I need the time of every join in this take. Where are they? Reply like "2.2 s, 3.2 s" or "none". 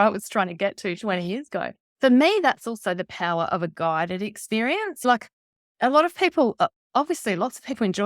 1.8 s